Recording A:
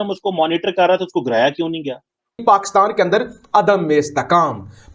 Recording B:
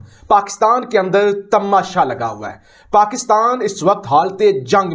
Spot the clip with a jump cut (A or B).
A